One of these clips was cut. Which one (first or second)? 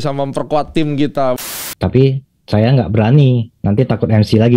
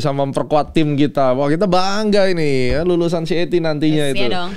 first